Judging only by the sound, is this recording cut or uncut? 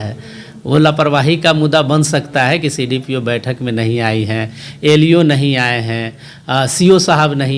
uncut